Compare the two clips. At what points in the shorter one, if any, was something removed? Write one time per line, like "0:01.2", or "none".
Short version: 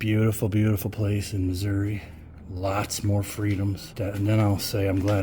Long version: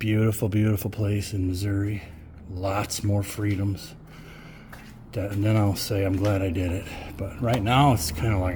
0:03.9